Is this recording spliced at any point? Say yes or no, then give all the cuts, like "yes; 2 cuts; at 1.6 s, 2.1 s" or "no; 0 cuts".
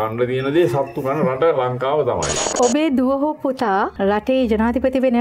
yes; 2 cuts; at 2.4 s, 3.9 s